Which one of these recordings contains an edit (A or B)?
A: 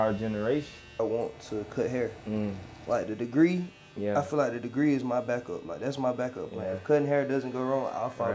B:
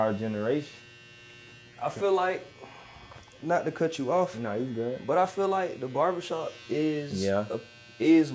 A